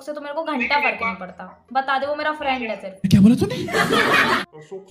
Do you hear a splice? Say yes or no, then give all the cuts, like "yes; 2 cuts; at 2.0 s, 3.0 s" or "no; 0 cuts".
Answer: no; 0 cuts